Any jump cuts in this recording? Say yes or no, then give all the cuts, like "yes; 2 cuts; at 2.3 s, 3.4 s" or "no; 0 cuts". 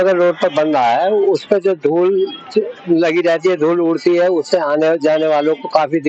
no; 0 cuts